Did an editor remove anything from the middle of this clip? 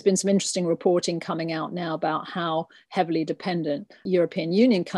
no; 0 cuts

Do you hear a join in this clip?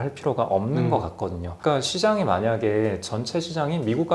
no; 0 cuts

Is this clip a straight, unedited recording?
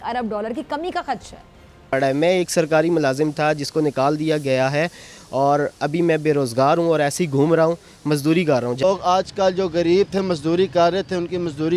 no; 2 cuts; at 1.9 s, 8.8 s

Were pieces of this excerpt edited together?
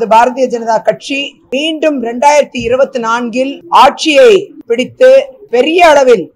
no; 0 cuts

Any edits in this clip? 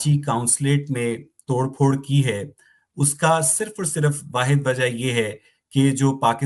no; 0 cuts

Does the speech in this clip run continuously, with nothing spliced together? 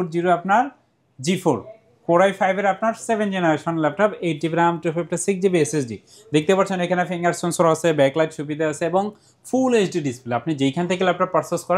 yes; 0 cuts

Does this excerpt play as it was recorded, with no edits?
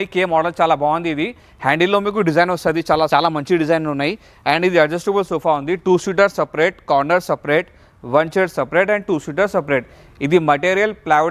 yes; 0 cuts

